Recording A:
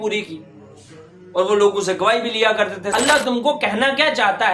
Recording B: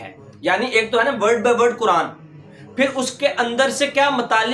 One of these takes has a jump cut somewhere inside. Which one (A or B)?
A